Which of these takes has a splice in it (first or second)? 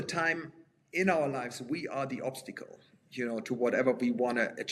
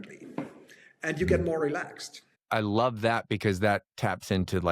second